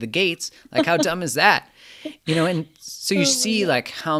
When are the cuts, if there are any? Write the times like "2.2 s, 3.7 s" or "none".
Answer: none